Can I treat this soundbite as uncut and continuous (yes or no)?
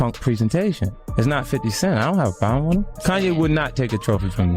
no